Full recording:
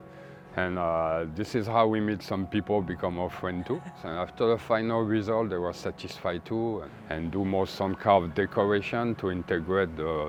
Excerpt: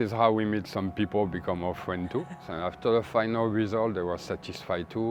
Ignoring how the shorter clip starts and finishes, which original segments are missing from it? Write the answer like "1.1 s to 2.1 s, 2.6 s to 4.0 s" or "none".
none